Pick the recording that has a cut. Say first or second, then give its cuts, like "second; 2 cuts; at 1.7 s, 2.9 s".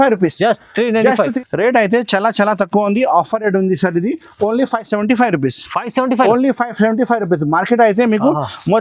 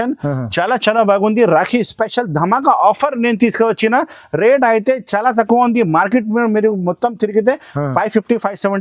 first; 1 cut; at 1.3 s